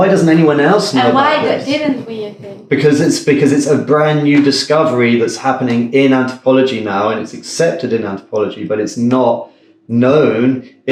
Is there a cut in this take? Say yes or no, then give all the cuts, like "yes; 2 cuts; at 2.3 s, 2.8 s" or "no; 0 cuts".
no; 0 cuts